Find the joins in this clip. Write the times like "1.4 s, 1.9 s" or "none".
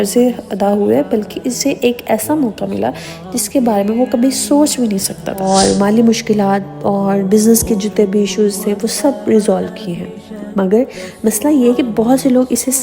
5.4 s